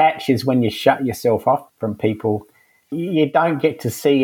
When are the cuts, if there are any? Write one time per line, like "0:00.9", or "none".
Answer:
0:01.7
0:02.9

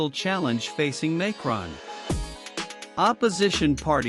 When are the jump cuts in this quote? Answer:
0:01.9
0:02.9

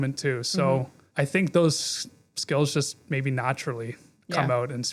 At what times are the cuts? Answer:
0:01.0

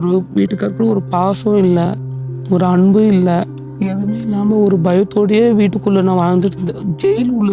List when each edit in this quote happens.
0:02.0
0:03.6

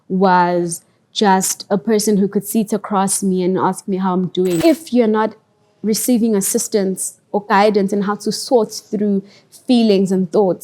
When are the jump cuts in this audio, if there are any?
0:04.6

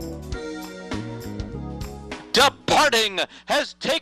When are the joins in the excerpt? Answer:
0:02.2

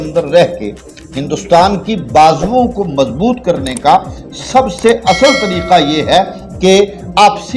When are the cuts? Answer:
none

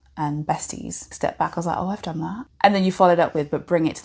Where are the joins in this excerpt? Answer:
0:01.1
0:02.5

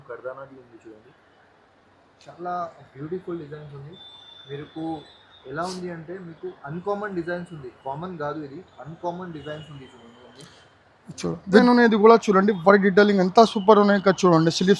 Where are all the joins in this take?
0:11.5

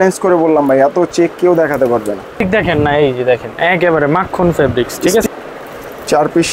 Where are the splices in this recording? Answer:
0:02.4
0:05.2

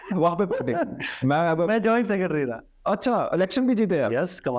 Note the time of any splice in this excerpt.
none

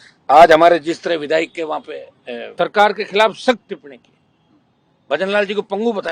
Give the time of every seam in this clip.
0:02.5

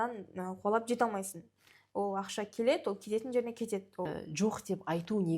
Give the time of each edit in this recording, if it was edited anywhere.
0:04.1

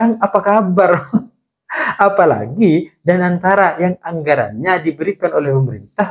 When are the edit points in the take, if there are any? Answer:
none

